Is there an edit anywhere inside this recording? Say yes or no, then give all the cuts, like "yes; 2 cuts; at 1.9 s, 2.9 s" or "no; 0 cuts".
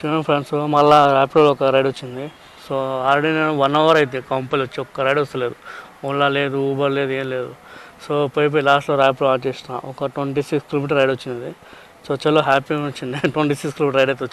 no; 0 cuts